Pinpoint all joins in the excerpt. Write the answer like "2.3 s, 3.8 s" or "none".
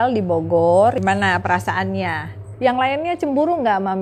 1.0 s, 2.5 s